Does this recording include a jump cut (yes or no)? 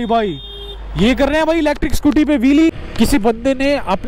yes